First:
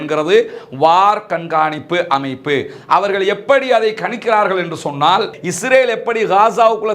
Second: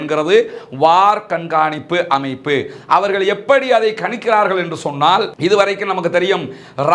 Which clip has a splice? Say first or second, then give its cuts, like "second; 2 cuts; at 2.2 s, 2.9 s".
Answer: first; 1 cut; at 5.3 s